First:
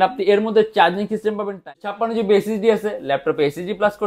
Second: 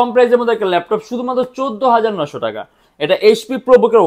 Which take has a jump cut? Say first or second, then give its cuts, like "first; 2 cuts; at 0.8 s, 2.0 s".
first; 1 cut; at 1.5 s